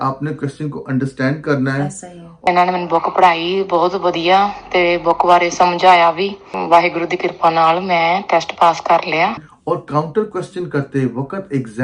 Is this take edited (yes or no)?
yes